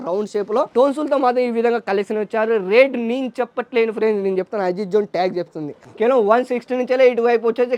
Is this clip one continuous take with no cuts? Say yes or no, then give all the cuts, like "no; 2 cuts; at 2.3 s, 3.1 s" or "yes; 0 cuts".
yes; 0 cuts